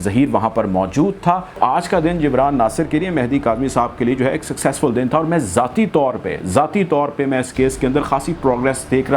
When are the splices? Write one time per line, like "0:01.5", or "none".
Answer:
0:01.6

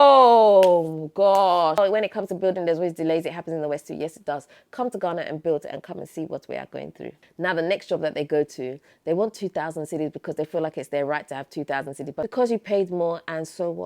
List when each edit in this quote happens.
0:01.8
0:07.2
0:12.2

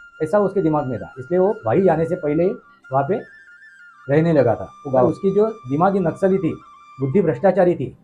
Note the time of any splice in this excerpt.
0:05.1

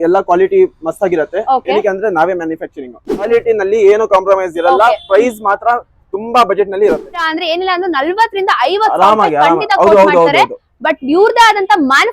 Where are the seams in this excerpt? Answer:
0:03.3
0:07.3

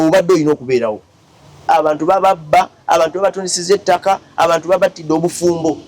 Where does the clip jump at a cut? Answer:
0:01.6

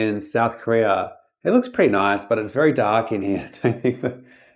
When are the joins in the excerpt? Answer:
none

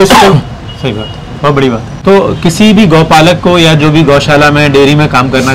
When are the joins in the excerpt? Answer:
0:01.9

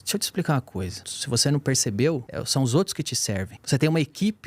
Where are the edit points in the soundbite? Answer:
0:01.1
0:02.3
0:03.5

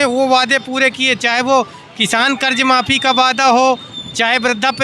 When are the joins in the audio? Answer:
none

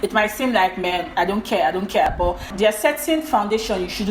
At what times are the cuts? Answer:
0:02.1

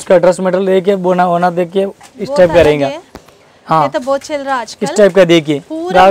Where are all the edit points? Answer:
none

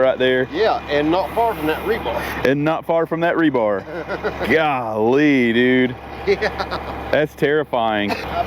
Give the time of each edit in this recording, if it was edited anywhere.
none

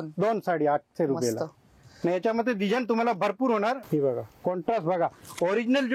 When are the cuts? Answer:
0:03.8

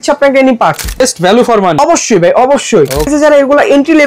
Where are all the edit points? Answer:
0:01.0
0:01.8
0:03.1

